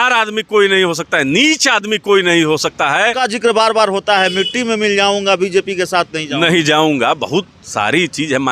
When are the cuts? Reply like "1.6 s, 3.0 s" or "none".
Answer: 3.2 s